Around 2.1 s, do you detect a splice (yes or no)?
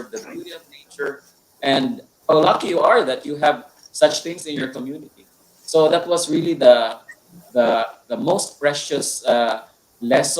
yes